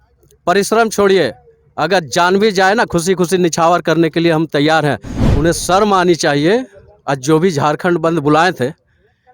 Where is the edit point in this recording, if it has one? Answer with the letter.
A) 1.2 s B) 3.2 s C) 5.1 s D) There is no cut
C